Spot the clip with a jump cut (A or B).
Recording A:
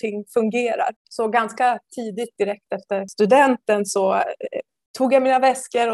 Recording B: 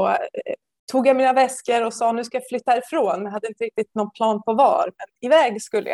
A